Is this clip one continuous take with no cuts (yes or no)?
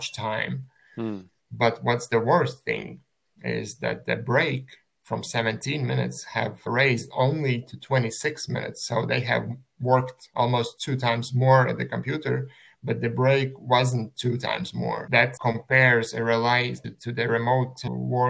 yes